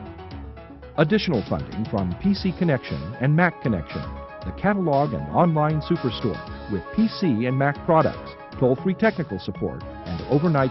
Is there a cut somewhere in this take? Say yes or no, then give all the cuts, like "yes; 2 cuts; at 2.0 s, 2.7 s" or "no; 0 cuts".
no; 0 cuts